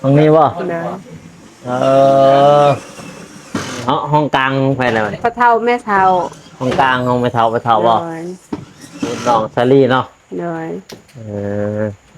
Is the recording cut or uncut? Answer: cut